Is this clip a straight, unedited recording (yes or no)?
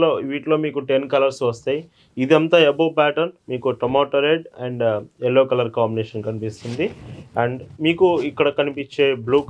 yes